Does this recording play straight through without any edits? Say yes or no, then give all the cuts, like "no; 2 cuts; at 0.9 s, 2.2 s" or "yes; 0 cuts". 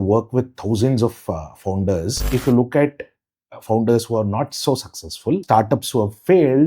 no; 2 cuts; at 2.2 s, 5.4 s